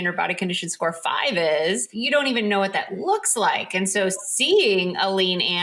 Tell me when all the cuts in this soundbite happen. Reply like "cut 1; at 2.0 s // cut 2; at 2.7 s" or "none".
cut 1; at 1.9 s